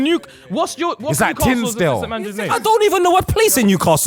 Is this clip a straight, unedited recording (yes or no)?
yes